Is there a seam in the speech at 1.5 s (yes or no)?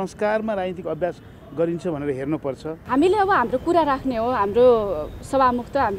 no